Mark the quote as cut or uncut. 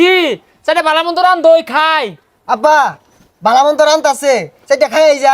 uncut